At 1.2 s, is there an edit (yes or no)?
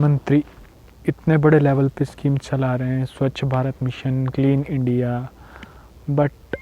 no